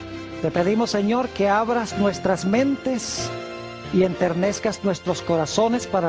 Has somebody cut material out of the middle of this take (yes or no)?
yes